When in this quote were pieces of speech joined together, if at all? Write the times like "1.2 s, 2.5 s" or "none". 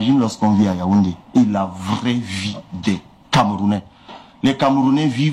1.2 s